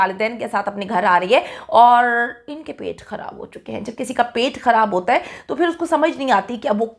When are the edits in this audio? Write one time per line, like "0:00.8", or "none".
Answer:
none